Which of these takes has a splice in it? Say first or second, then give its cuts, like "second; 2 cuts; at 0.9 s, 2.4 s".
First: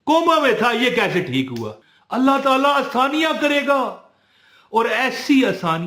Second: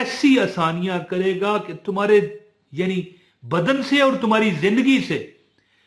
first; 1 cut; at 1.7 s